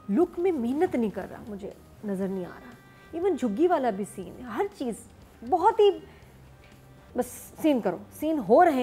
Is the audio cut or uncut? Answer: uncut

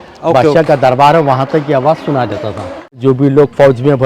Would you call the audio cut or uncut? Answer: cut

